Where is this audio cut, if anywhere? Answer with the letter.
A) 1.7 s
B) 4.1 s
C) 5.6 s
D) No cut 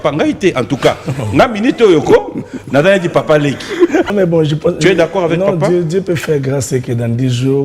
B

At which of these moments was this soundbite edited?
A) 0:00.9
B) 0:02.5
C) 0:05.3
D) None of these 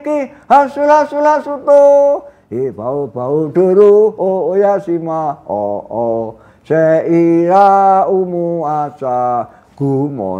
D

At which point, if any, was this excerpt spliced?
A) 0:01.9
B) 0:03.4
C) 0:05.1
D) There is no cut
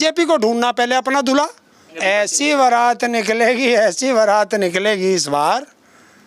A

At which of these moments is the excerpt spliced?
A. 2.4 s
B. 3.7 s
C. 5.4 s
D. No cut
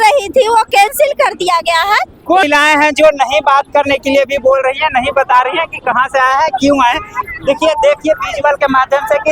A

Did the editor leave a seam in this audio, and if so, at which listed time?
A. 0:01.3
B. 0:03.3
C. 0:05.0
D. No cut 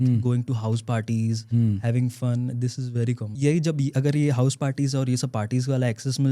B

